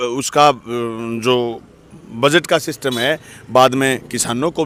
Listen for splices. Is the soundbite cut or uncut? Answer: uncut